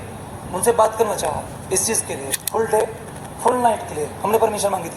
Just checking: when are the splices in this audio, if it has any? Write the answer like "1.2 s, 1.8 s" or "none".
2.3 s